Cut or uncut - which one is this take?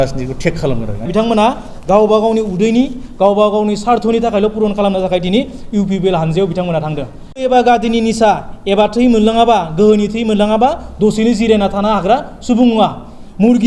cut